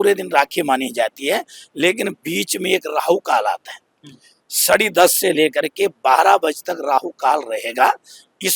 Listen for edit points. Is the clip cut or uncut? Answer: uncut